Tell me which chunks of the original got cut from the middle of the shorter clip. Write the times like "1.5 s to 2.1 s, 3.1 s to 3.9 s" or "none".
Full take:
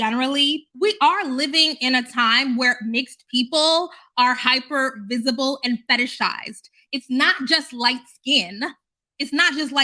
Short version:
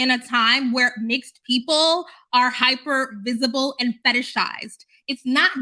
none